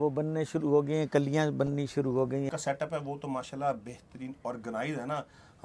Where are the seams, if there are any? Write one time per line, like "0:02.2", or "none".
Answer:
0:02.5

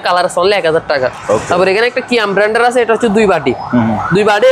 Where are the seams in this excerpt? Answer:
none

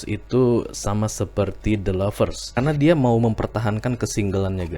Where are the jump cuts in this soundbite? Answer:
0:02.5

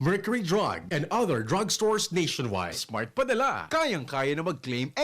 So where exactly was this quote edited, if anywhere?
0:02.8

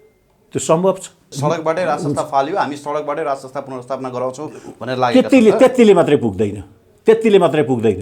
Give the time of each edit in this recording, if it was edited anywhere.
0:01.2

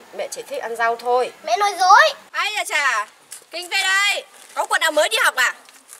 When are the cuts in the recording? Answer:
0:02.3

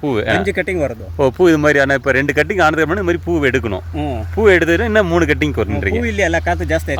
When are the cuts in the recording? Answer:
none

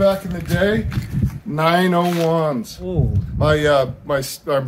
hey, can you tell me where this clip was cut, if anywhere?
0:02.8

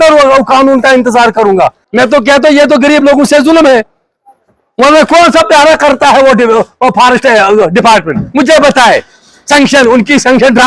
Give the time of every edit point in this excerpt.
0:01.8

